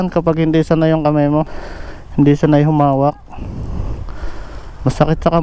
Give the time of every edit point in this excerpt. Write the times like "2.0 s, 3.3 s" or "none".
none